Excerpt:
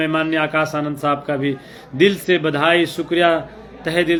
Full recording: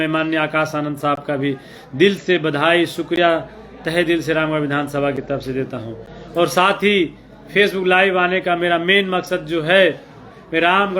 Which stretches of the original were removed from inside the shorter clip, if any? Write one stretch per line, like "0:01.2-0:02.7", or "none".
none

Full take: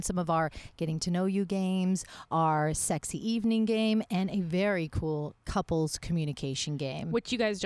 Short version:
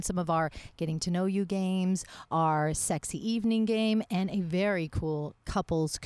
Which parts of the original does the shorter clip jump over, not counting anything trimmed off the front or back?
none

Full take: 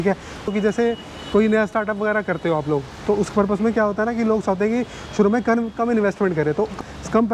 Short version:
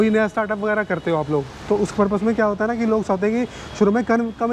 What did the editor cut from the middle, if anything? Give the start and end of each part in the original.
none

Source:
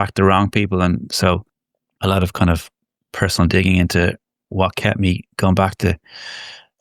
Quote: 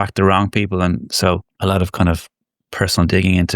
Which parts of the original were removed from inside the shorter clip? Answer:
0:01.5-0:01.9

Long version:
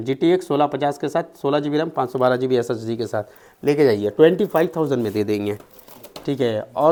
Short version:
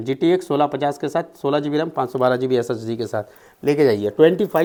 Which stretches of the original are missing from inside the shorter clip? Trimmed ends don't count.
none

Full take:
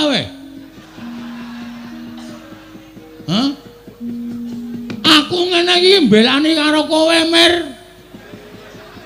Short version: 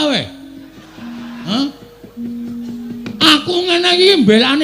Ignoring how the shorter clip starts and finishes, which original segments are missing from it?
0:01.4-0:03.3

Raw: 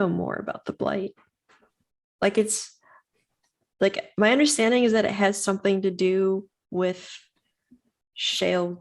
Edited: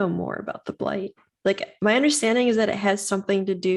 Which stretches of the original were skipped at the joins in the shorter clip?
0:01.2-0:03.6

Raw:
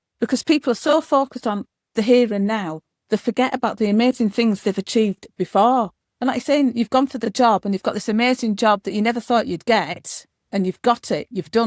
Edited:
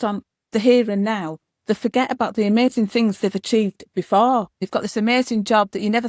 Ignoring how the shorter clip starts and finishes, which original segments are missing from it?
0:06.0-0:07.7

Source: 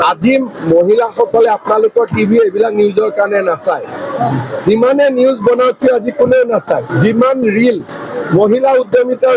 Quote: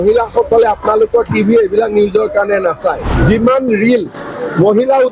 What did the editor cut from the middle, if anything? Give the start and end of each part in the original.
0:04.0-0:06.9

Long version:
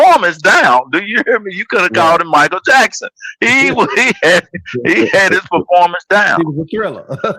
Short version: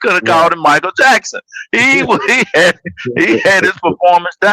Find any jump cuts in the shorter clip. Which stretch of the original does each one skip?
none

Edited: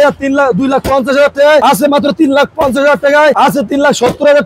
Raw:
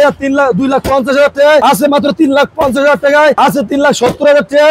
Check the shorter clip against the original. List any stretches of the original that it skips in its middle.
none

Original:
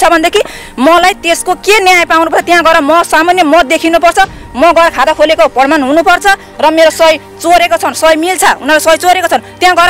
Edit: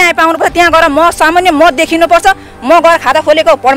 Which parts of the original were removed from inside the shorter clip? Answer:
none

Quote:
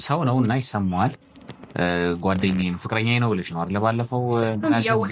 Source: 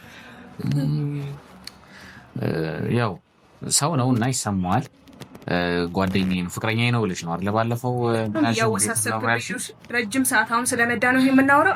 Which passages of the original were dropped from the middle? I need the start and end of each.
none

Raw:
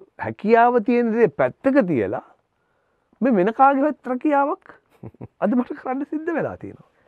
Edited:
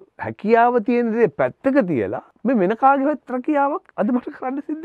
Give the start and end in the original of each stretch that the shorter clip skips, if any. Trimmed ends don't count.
0:02.3-0:03.0
0:04.6-0:05.3

